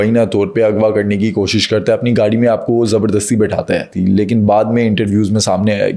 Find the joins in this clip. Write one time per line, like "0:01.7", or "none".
0:03.9